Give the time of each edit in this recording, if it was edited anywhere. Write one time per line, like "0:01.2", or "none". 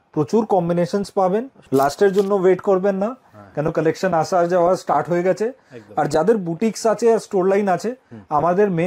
0:01.6